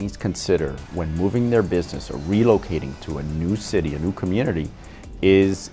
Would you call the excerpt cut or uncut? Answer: uncut